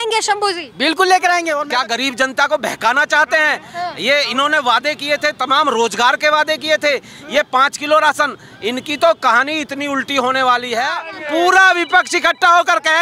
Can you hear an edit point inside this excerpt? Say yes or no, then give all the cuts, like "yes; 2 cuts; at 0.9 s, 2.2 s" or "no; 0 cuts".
yes; 2 cuts; at 1.6 s, 11.1 s